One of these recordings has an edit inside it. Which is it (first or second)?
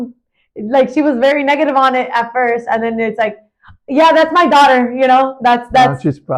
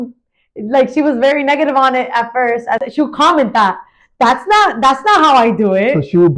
second